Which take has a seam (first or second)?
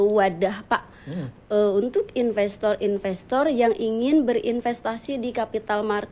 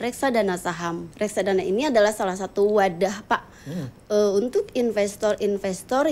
second